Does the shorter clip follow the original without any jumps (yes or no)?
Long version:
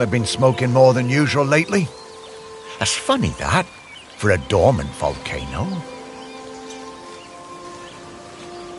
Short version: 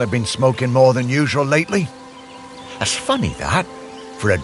yes